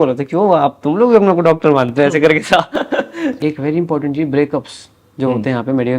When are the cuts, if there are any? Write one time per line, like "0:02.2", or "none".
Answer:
0:03.4